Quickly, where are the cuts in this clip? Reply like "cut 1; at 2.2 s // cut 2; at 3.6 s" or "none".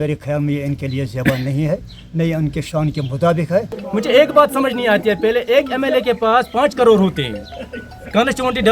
cut 1; at 3.8 s